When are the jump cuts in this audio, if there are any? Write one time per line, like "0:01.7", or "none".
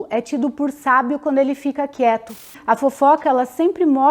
0:02.6